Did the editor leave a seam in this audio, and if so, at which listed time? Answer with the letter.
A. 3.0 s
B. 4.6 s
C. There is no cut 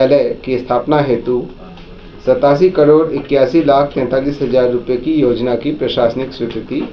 C